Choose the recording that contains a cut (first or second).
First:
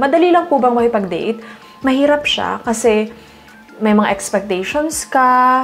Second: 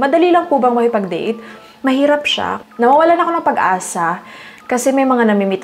second